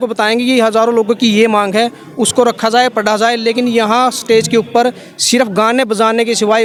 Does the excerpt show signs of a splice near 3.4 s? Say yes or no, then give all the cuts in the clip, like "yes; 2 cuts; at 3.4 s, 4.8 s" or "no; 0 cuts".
no; 0 cuts